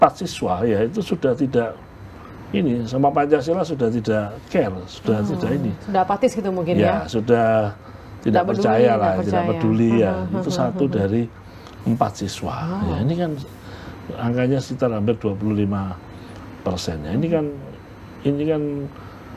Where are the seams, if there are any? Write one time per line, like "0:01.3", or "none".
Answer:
none